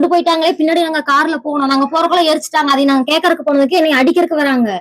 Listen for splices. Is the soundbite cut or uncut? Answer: uncut